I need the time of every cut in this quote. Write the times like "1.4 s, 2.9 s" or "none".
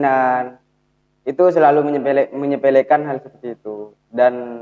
none